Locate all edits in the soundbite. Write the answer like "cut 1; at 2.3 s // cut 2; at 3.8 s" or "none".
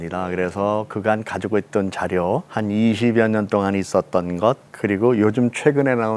cut 1; at 2.5 s // cut 2; at 4.7 s